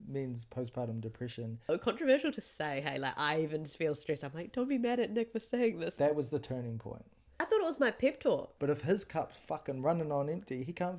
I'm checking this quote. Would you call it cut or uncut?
cut